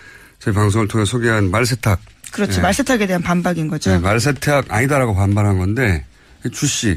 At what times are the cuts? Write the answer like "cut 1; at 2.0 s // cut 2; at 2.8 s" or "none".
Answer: none